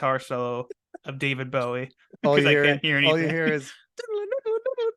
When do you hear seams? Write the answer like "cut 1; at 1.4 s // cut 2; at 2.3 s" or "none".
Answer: cut 1; at 2.1 s